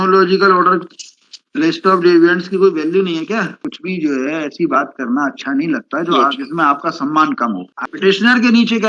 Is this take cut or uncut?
cut